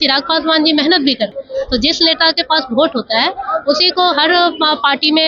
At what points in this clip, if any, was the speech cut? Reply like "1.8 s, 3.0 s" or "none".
1.4 s